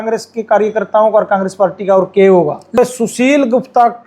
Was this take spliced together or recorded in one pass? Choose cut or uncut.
cut